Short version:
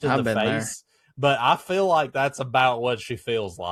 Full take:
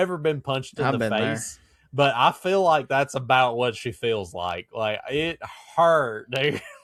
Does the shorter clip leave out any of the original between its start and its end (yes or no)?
no